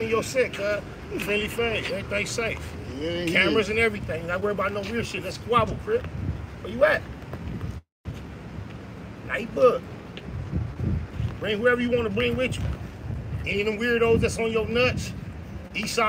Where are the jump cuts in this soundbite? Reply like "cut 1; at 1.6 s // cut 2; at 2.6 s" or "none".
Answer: none